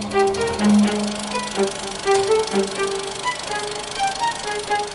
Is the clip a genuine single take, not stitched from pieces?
yes; 0 cuts

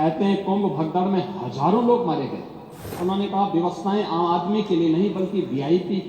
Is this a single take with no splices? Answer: no; 1 cut; at 2.9 s

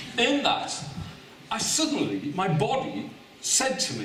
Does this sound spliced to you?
no; 0 cuts

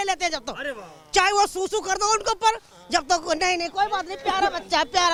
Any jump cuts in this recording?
no; 0 cuts

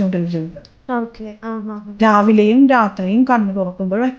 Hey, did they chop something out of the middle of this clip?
no; 0 cuts

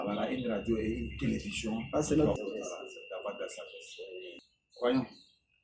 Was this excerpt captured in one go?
no; 2 cuts; at 2.4 s, 4.4 s

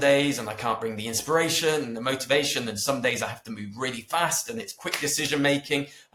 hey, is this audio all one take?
yes; 0 cuts

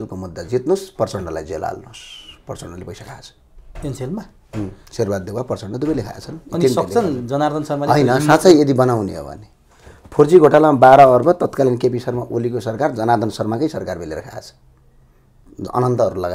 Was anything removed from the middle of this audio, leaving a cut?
no; 0 cuts

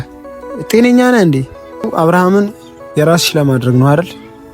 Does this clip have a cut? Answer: yes; 1 cut; at 1.9 s

